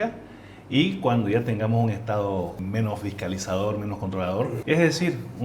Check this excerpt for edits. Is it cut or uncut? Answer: cut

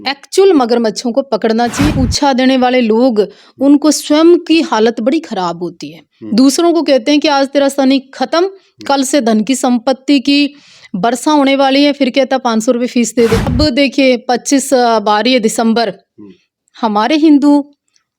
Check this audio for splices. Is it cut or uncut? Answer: cut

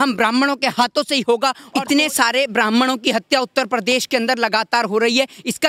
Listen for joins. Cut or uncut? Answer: cut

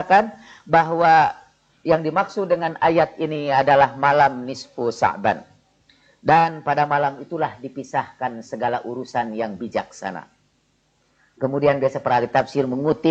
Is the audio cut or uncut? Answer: uncut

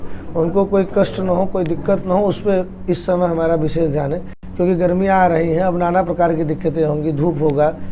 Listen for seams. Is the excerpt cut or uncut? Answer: uncut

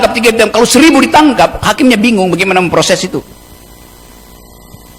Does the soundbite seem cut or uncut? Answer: uncut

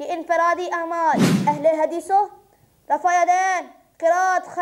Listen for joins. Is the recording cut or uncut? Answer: cut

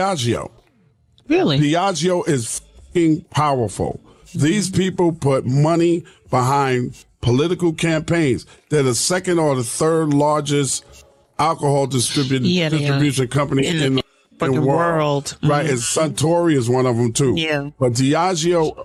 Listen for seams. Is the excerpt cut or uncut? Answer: uncut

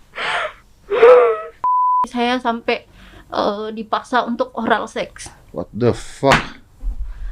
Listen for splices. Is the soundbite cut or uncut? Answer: cut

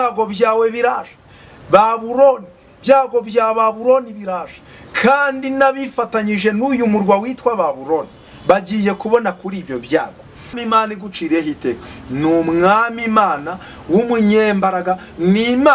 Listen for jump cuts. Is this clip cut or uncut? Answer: cut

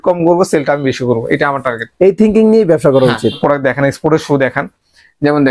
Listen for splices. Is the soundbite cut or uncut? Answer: cut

